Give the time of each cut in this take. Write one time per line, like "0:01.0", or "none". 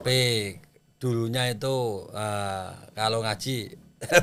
none